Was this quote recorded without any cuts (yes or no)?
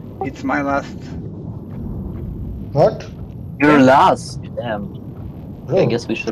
yes